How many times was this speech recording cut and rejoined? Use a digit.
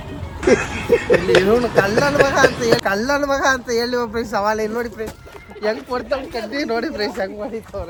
0